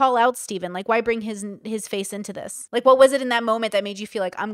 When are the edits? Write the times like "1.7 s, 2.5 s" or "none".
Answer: 2.5 s